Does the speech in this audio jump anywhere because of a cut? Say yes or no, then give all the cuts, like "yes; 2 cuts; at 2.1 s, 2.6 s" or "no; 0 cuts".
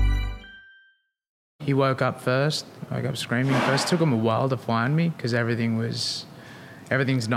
yes; 1 cut; at 1.6 s